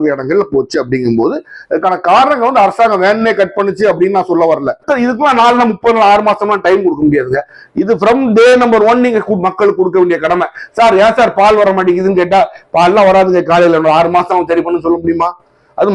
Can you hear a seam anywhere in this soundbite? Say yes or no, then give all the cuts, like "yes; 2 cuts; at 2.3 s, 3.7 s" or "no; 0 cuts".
yes; 1 cut; at 4.8 s